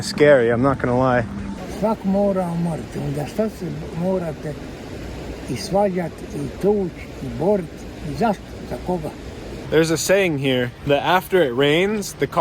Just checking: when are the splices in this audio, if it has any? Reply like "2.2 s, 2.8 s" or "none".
1.6 s, 9.5 s, 10.8 s